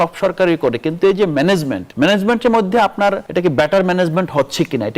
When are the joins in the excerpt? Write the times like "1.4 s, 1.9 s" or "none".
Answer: 1.8 s, 3.2 s